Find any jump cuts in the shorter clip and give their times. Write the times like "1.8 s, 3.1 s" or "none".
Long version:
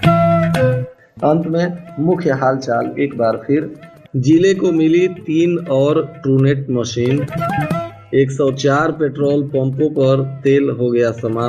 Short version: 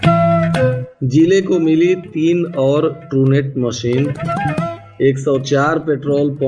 0.9 s